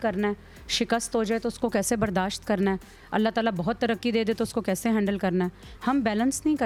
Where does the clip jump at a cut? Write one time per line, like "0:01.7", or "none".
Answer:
none